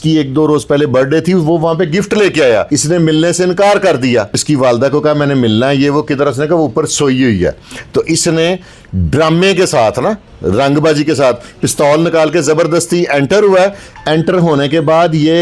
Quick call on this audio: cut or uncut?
cut